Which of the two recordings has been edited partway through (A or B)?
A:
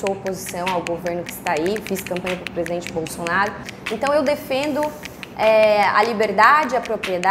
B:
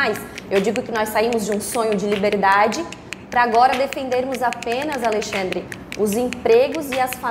A